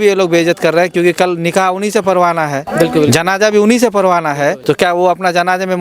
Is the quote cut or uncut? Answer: cut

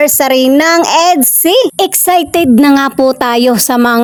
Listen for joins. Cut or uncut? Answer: uncut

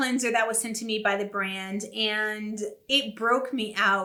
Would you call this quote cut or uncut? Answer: uncut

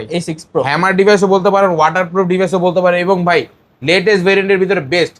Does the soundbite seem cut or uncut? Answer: uncut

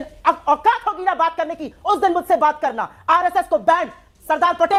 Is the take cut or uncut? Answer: uncut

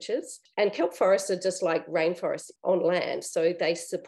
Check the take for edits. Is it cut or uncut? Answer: cut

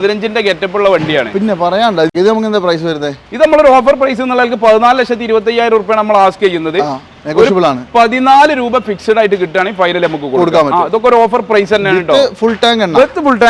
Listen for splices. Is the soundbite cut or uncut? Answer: cut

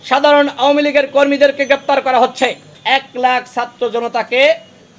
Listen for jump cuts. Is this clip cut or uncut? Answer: cut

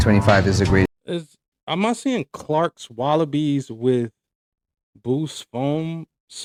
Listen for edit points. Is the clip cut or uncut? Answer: uncut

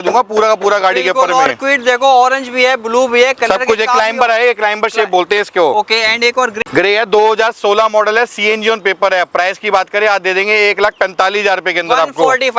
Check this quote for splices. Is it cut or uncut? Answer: uncut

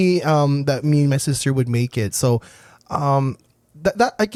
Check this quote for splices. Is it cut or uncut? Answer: uncut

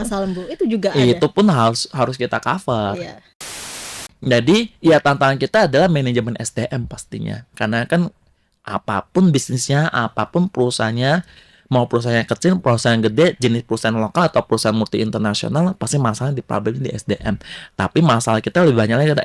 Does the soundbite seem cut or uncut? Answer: cut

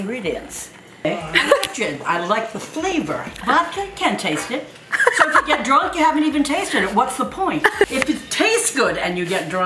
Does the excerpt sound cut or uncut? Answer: cut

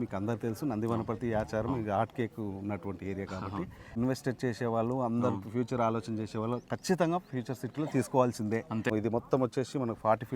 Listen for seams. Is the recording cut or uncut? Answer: cut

